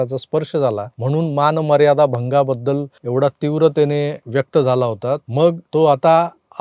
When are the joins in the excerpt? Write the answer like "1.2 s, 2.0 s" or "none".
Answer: 0.9 s, 2.9 s, 4.2 s, 5.4 s